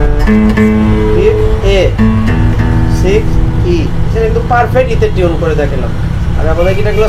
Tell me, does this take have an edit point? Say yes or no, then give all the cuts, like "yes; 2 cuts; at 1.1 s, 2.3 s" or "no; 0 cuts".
no; 0 cuts